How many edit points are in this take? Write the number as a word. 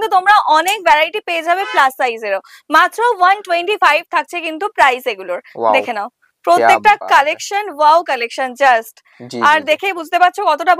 zero